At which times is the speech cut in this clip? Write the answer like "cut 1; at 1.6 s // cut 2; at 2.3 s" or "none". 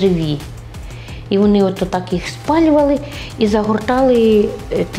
none